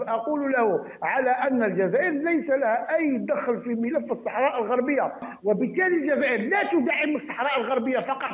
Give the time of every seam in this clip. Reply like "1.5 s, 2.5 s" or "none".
5.3 s